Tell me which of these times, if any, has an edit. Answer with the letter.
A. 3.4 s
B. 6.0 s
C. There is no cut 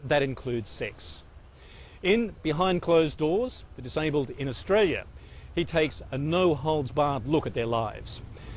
C